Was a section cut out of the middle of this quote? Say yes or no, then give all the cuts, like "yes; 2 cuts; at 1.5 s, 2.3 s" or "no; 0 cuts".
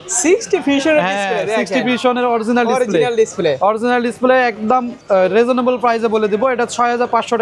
no; 0 cuts